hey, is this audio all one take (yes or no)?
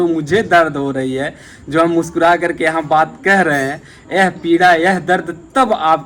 yes